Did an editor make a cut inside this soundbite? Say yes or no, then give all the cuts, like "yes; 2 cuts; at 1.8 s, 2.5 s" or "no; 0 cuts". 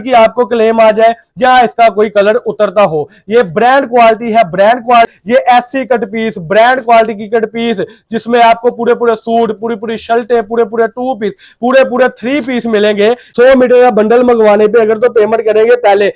yes; 2 cuts; at 5.1 s, 13.2 s